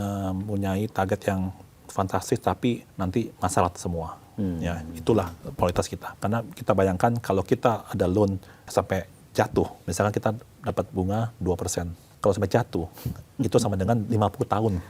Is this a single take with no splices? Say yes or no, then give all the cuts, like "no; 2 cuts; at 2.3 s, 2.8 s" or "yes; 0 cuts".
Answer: no; 5 cuts; at 2.9 s, 6.0 s, 8.5 s, 9.8 s, 12.0 s